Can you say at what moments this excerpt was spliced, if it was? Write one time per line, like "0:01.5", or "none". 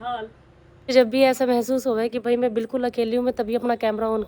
0:00.9